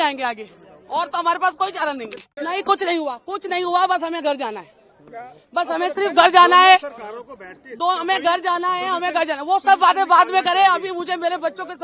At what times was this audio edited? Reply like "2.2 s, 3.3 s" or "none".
2.2 s